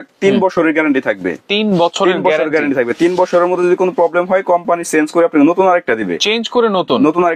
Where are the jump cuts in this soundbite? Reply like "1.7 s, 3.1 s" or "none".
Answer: none